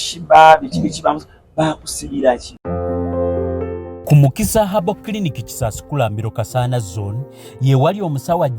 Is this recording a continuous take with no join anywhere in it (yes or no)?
no